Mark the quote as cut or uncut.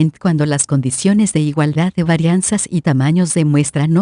uncut